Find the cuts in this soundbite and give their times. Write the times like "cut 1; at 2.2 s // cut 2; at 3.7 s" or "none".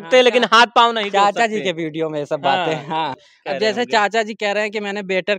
cut 1; at 3.3 s